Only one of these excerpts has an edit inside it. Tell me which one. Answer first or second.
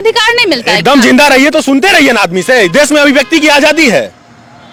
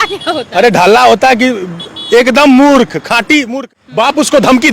second